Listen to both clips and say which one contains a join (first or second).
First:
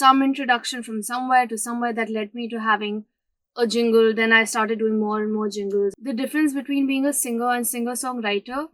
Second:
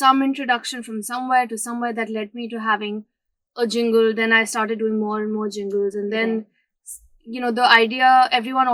first